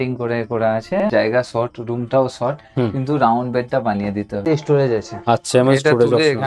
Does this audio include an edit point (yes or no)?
yes